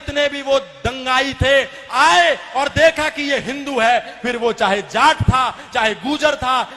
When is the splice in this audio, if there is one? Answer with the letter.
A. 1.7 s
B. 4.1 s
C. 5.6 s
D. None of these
D